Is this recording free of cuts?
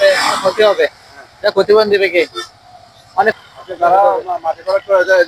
no; 1 cut; at 3.3 s

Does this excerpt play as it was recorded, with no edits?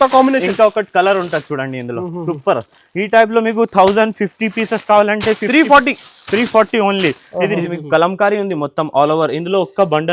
no; 1 cut; at 7.6 s

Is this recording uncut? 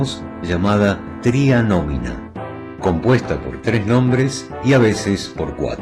yes; 0 cuts

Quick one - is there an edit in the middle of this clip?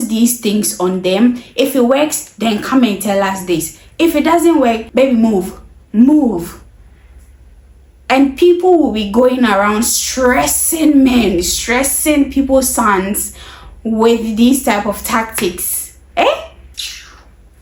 no; 0 cuts

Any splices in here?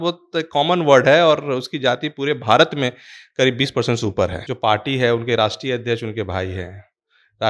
yes; 1 cut; at 4.4 s

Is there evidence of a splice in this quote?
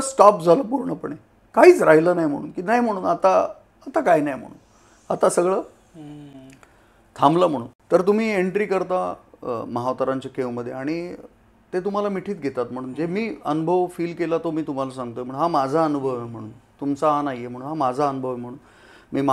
no; 0 cuts

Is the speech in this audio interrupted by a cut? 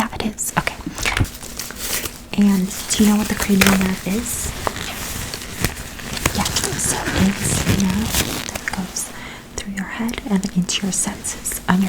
yes; 1 cut; at 1.3 s

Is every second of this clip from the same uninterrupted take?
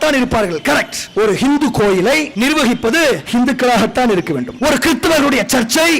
no; 4 cuts; at 1.0 s, 2.3 s, 3.2 s, 4.5 s

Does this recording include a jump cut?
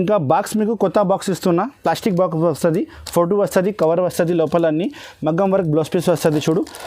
no; 0 cuts

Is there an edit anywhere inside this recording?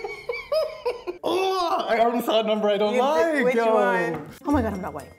yes; 2 cuts; at 1.1 s, 4.3 s

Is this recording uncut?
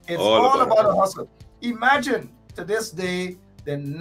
yes; 0 cuts

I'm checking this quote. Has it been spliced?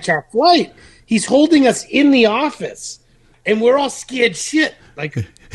yes; 1 cut; at 3.3 s

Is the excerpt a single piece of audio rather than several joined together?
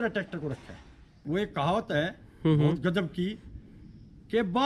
no; 1 cut; at 1.2 s

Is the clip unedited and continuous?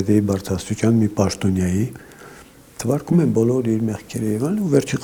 yes; 0 cuts

